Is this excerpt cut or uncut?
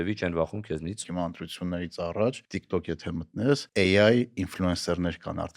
cut